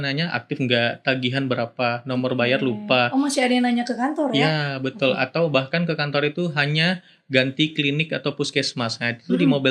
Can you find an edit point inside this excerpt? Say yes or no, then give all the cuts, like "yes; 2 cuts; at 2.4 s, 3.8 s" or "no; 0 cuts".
no; 0 cuts